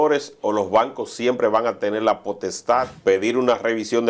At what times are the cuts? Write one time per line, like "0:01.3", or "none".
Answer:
0:02.9